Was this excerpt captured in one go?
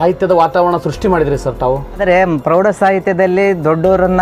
no; 1 cut; at 2.0 s

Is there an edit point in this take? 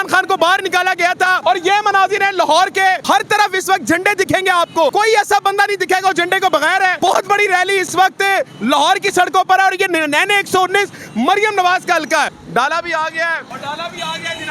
yes; 6 cuts; at 1.4 s, 3.0 s, 4.9 s, 6.9 s, 12.4 s, 13.5 s

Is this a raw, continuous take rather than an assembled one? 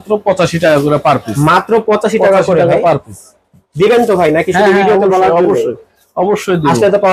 yes; 0 cuts

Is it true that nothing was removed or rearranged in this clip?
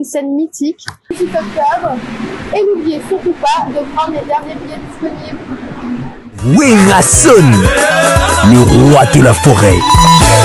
no; 1 cut; at 1.1 s

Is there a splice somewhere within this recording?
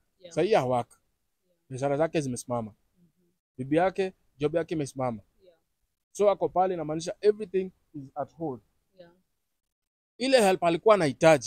no; 0 cuts

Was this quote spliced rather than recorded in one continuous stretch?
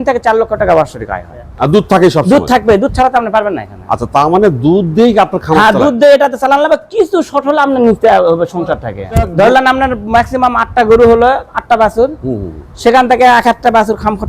yes; 2 cuts; at 1.4 s, 9.3 s

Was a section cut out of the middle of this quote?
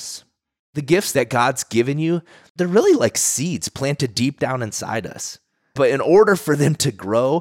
yes; 2 cuts; at 0.9 s, 2.4 s

